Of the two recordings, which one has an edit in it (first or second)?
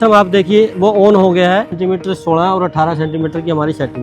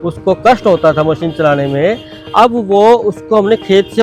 first